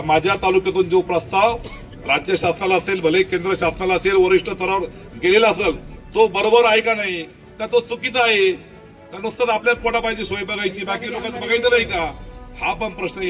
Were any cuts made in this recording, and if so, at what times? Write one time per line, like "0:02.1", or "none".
none